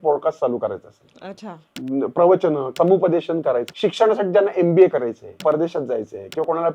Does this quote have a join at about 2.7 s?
yes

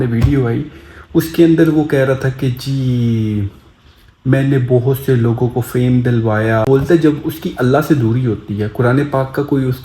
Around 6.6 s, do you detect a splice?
yes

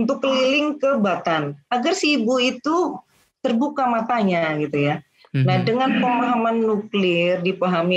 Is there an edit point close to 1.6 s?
yes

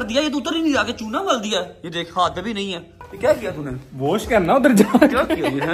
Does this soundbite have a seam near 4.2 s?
no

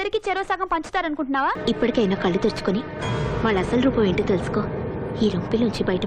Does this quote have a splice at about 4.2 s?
no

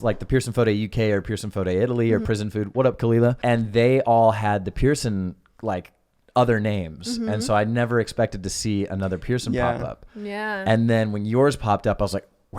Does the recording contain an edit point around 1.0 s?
no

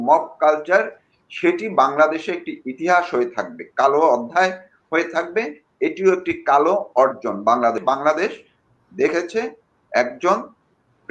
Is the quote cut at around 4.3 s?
no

